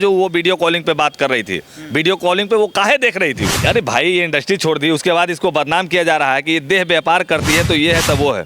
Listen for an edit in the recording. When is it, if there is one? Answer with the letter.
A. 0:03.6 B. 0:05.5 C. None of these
A